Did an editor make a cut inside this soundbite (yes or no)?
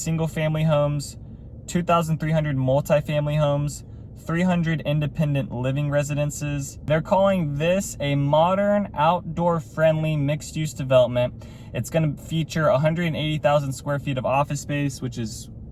yes